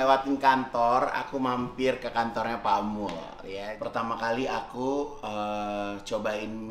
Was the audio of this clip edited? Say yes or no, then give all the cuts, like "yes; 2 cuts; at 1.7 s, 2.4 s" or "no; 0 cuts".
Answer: yes; 1 cut; at 3.2 s